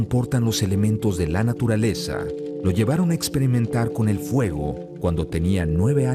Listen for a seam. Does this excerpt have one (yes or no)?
yes